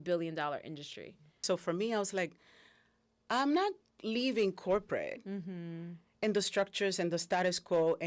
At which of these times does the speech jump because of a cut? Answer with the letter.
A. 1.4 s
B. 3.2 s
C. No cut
A